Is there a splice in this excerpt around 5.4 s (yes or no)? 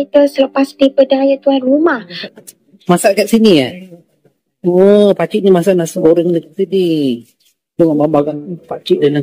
no